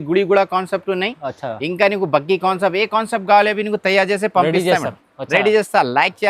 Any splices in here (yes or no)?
no